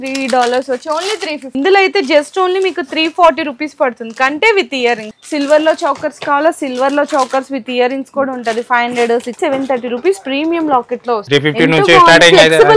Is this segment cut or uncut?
cut